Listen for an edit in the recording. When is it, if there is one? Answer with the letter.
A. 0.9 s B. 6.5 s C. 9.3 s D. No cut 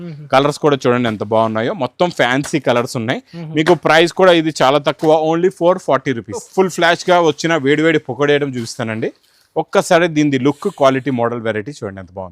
B